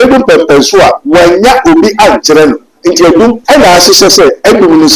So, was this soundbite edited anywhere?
yes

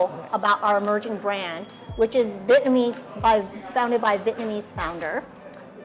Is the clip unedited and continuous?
yes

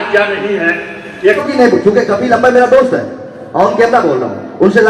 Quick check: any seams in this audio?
yes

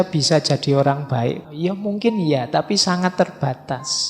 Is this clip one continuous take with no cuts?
no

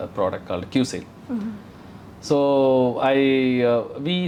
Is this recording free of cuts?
yes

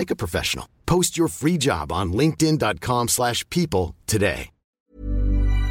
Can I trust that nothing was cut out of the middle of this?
no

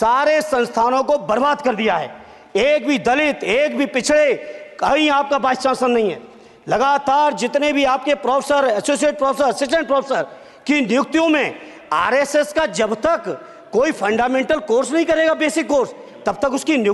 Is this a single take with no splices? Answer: yes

